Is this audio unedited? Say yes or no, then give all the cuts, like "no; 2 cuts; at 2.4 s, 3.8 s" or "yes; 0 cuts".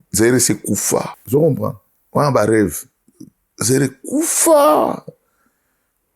no; 1 cut; at 1.2 s